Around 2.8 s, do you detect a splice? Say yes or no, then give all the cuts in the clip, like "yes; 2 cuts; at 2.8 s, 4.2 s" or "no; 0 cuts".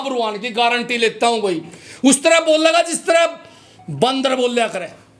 no; 0 cuts